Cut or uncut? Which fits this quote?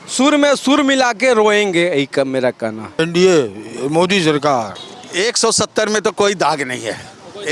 cut